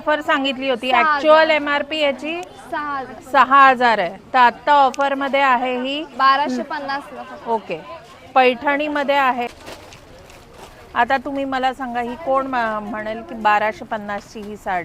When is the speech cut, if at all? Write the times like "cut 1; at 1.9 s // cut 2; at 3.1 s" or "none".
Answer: cut 1; at 9.5 s